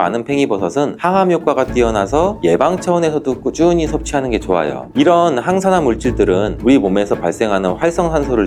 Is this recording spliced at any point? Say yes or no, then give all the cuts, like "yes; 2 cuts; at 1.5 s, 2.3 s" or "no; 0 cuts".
no; 0 cuts